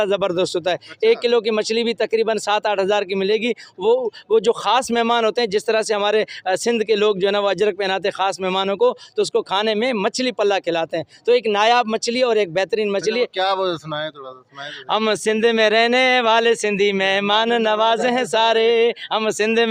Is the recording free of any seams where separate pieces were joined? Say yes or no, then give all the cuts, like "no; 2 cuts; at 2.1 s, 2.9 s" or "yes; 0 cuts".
yes; 0 cuts